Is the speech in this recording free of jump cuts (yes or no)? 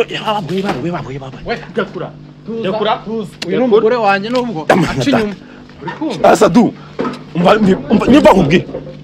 yes